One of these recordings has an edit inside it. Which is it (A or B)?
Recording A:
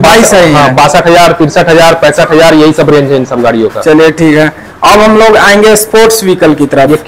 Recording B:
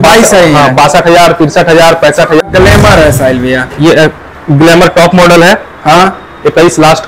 B